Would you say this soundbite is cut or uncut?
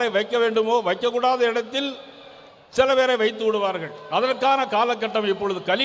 uncut